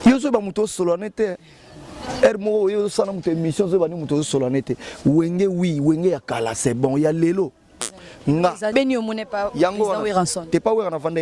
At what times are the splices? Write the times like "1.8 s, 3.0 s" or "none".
8.7 s